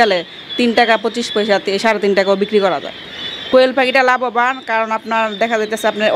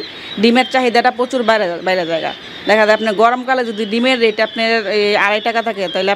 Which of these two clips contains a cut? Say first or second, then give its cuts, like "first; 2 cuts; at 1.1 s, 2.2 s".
first; 1 cut; at 3.5 s